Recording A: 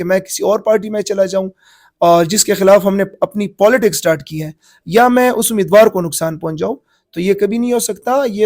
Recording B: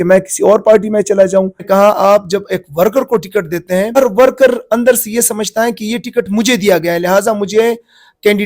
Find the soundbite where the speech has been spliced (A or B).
B